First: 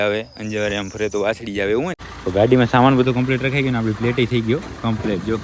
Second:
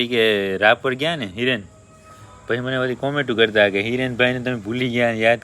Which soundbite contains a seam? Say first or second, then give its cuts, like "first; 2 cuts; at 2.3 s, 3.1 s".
first; 1 cut; at 2.2 s